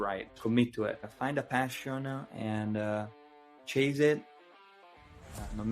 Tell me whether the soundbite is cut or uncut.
cut